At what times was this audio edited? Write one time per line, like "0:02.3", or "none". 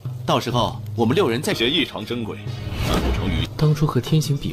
none